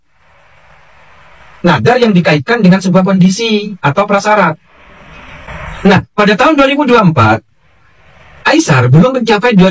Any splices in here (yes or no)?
no